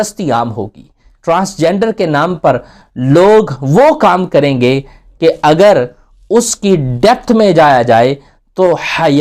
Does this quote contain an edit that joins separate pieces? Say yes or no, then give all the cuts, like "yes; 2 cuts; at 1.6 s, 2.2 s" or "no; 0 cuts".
no; 0 cuts